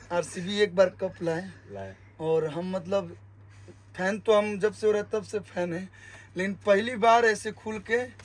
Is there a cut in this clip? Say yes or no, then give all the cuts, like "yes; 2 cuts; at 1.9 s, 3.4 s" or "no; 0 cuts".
no; 0 cuts